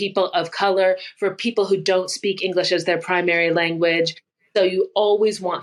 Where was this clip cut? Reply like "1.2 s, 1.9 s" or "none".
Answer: none